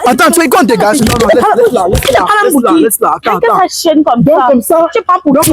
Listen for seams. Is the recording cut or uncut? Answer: uncut